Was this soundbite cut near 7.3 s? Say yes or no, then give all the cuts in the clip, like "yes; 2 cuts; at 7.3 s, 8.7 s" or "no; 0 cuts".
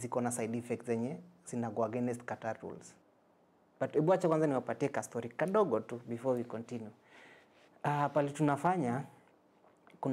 no; 1 cut; at 2.9 s